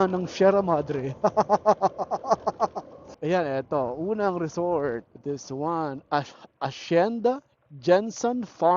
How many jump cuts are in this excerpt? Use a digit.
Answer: 2